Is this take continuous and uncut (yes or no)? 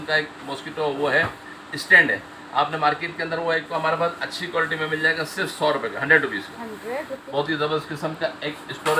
no